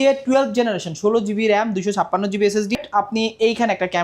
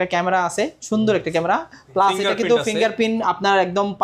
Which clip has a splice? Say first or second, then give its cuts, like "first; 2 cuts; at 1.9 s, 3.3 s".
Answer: first; 1 cut; at 2.8 s